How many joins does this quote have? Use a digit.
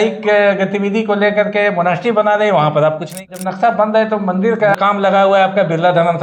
2